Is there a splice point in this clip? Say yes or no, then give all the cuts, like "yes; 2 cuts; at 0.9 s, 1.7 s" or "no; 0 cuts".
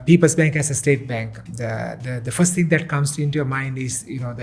no; 0 cuts